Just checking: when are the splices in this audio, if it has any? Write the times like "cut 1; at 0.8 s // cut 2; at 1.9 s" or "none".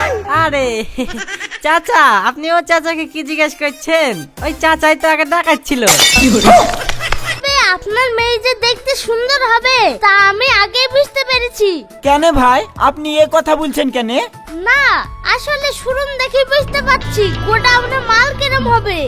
cut 1; at 7.4 s